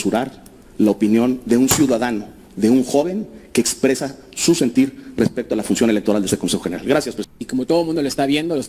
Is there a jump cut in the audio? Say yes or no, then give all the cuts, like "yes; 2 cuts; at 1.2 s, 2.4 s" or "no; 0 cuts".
no; 0 cuts